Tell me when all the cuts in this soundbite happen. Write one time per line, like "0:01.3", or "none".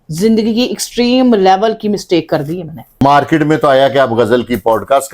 0:03.0